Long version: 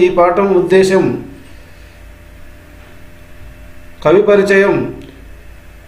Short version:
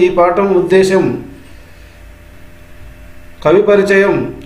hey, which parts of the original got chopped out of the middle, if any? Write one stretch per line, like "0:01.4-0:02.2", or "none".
0:02.3-0:02.9